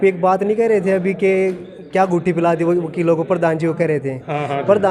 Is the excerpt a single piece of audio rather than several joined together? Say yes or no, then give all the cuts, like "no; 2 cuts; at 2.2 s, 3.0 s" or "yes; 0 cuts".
yes; 0 cuts